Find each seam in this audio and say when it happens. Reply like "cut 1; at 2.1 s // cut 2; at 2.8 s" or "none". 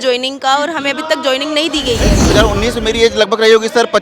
cut 1; at 2.2 s